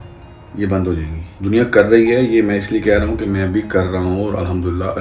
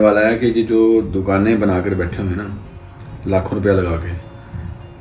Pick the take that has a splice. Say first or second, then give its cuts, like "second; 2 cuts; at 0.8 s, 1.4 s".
first; 1 cut; at 1.2 s